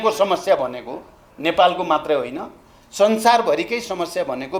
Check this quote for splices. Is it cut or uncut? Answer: uncut